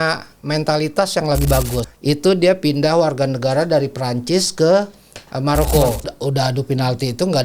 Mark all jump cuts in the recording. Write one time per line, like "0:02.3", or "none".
0:01.8
0:06.0